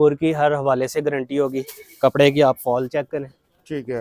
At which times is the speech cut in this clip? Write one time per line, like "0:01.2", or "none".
none